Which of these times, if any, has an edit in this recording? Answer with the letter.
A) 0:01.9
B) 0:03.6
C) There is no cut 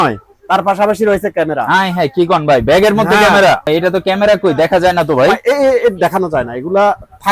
B